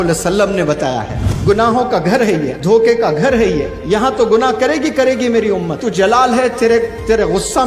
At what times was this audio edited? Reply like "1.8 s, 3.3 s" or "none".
1.3 s, 2.5 s, 3.7 s, 5.8 s